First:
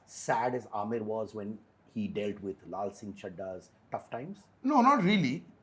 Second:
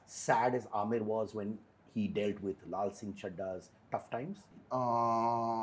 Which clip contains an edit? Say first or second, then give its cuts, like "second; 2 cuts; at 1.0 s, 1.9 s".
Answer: second; 1 cut; at 4.5 s